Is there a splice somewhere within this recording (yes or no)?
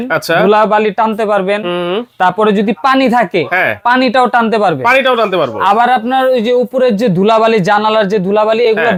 no